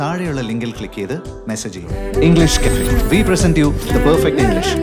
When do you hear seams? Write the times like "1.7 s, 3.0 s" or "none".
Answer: none

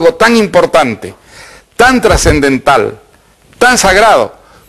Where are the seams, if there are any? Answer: none

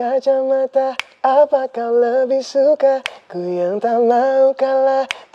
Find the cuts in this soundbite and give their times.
none

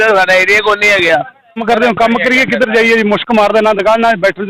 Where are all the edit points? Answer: 1.6 s

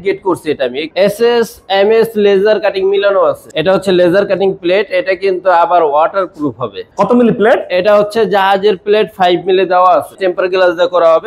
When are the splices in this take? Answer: 0.9 s, 3.4 s, 6.8 s, 10.2 s

